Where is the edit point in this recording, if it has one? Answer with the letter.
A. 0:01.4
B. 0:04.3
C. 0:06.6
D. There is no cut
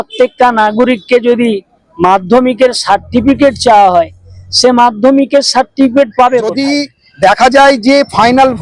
C